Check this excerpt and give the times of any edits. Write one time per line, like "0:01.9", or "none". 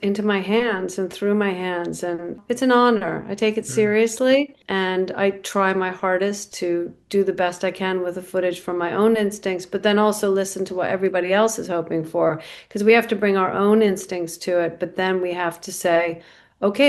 0:02.4
0:04.6

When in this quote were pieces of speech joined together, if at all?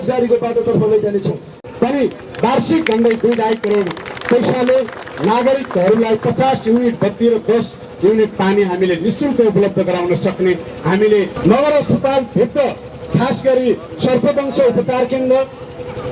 0:01.5
0:11.3

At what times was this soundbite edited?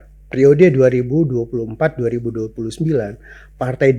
none

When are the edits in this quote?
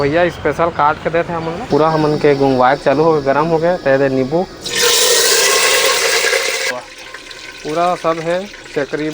0:01.7
0:06.7

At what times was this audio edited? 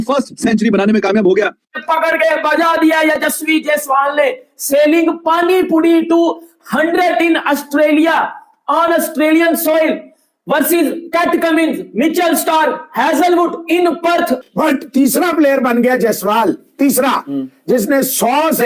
0:01.7
0:14.4

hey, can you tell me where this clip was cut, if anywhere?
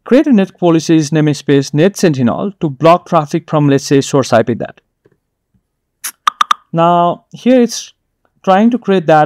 none

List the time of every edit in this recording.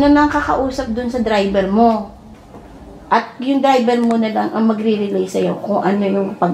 none

